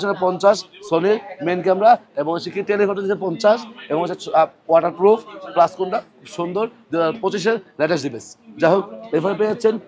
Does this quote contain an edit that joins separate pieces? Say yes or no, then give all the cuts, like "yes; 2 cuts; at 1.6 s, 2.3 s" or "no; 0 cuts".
no; 0 cuts